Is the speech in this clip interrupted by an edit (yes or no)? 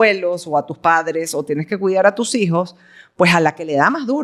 no